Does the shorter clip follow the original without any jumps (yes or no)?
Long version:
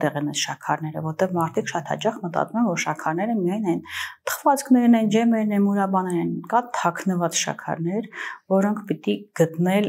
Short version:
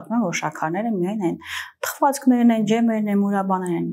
yes